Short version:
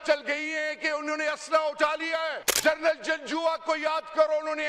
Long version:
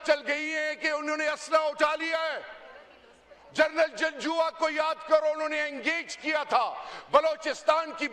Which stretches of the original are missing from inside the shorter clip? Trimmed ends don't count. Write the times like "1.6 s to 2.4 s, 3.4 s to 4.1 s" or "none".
2.5 s to 3.4 s